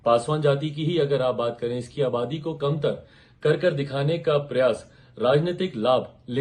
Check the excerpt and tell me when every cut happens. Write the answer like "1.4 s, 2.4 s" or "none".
none